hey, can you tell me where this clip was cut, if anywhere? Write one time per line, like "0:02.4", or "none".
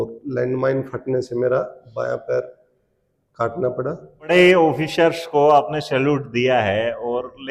0:04.3